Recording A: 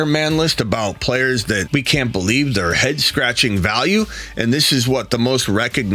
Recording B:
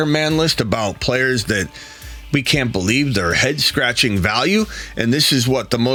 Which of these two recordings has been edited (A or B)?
A